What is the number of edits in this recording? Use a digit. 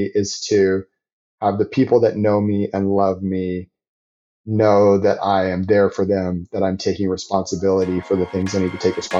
0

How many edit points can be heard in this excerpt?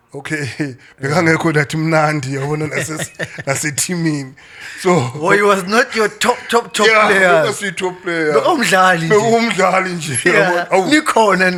0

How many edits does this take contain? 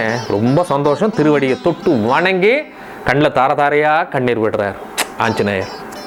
0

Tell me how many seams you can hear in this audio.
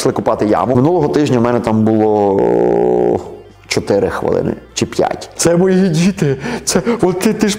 2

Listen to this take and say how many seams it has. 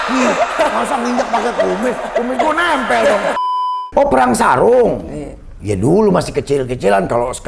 1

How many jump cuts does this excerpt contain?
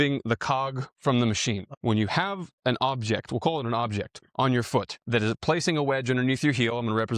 2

